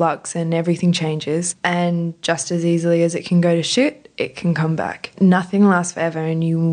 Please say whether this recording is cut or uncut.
cut